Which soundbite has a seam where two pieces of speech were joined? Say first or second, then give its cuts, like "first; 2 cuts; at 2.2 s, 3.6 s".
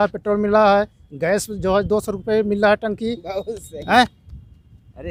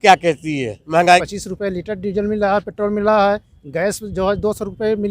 second; 1 cut; at 1.2 s